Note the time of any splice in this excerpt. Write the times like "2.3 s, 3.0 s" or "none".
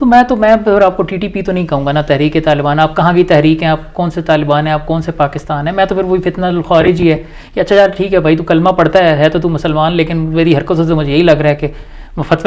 none